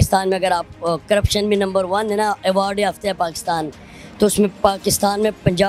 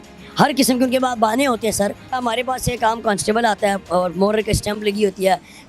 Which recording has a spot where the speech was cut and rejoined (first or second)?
second